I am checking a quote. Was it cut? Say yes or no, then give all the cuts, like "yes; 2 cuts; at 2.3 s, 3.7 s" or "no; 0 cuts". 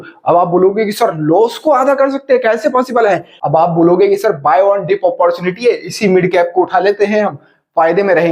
yes; 1 cut; at 3.3 s